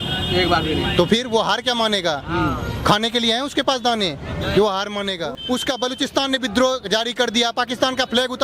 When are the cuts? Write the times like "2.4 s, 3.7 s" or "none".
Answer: 5.3 s